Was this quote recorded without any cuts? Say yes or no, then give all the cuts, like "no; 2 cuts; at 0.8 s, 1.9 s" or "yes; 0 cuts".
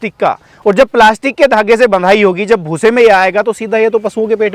yes; 0 cuts